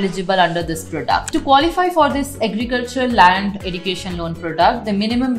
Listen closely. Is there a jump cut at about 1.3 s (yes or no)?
yes